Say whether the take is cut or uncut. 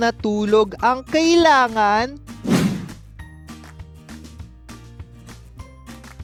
uncut